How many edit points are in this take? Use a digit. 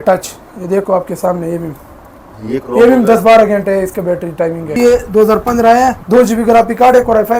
2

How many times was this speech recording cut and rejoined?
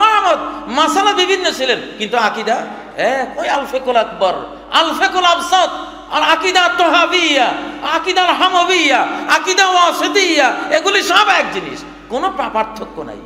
1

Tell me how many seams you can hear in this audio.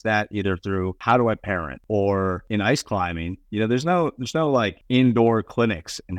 4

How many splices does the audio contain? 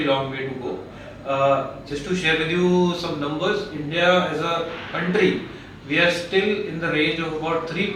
0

